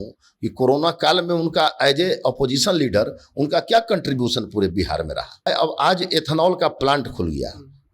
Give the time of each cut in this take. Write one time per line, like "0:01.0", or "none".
0:05.5